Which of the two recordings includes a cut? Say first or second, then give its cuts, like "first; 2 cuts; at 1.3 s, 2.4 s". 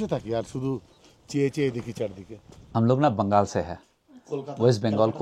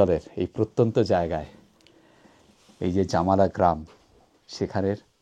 first; 1 cut; at 2.5 s